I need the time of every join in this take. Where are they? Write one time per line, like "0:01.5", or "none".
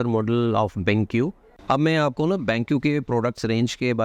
0:01.6